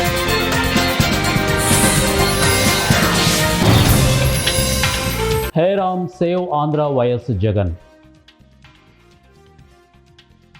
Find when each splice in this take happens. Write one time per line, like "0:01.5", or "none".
0:05.5